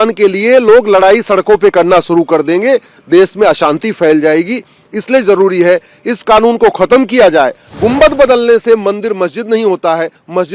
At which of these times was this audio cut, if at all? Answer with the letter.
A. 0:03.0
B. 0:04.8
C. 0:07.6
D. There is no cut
C